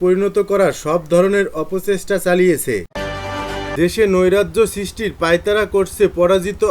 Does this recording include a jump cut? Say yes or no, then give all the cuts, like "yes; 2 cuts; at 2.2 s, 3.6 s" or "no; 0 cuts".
yes; 1 cut; at 3.1 s